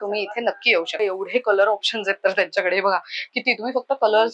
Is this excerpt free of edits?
no; 1 cut; at 1.0 s

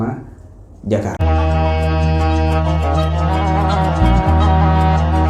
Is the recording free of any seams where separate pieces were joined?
no; 1 cut; at 1.2 s

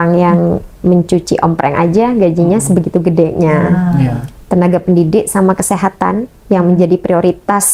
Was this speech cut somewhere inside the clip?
no; 0 cuts

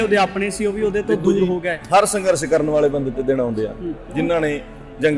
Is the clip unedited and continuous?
yes; 0 cuts

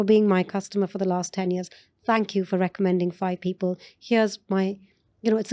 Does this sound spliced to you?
no; 0 cuts

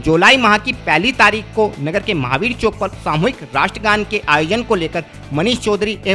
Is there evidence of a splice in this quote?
no; 0 cuts

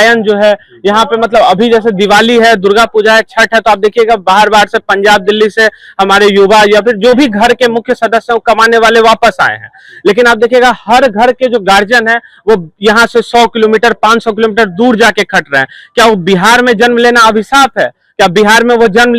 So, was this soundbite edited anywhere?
no; 0 cuts

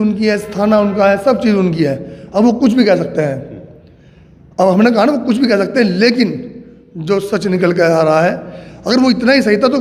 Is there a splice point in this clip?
no; 0 cuts

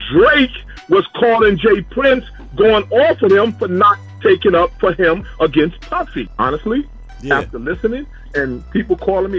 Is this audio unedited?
no; 1 cut; at 6.2 s

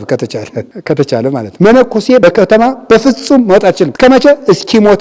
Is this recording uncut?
no; 2 cuts; at 1.5 s, 2.2 s

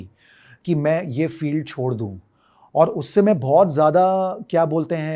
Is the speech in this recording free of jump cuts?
yes; 0 cuts

